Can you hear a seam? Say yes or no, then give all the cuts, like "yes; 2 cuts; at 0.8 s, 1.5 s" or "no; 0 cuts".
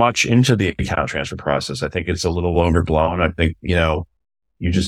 no; 0 cuts